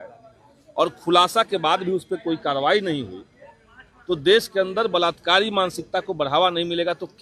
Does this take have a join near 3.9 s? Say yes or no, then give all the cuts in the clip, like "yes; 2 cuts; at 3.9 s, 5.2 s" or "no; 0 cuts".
no; 0 cuts